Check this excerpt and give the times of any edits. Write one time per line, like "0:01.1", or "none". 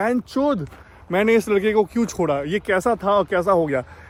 none